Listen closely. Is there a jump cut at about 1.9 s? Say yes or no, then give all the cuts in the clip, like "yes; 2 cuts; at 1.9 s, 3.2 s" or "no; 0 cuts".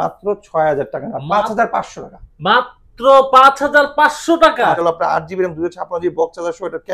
no; 1 cut; at 4.8 s